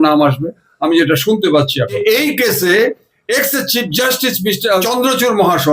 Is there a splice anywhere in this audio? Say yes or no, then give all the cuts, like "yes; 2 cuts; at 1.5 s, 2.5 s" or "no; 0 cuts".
yes; 2 cuts; at 2.0 s, 4.8 s